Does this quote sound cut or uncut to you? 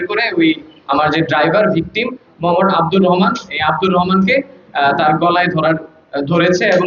uncut